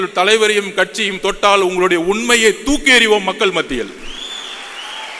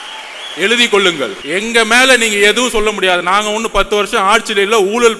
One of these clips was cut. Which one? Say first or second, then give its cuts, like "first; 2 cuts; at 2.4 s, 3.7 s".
second; 1 cut; at 1.4 s